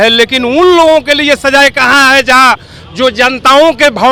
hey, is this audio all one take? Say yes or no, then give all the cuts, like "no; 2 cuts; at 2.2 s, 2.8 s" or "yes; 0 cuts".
yes; 0 cuts